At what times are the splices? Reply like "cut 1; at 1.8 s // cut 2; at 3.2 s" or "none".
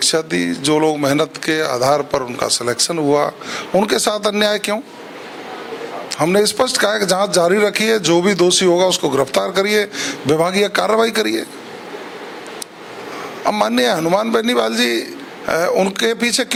none

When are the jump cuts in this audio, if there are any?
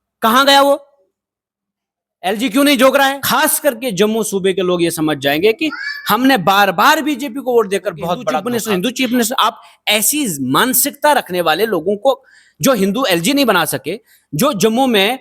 cut 1; at 3.2 s // cut 2; at 8.4 s

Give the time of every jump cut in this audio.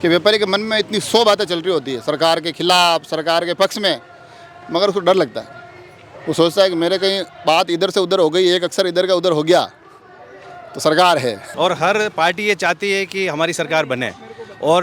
cut 1; at 11.4 s

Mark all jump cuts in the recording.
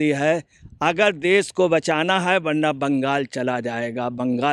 none

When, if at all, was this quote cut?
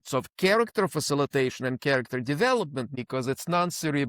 cut 1; at 2.8 s

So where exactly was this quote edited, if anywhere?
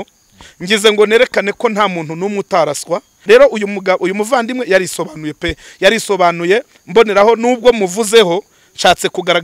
cut 1; at 3.2 s

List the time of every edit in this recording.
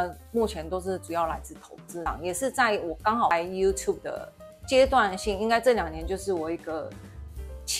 cut 1; at 1.9 s

